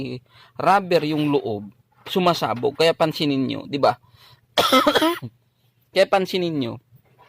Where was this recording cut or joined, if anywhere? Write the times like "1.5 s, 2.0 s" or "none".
none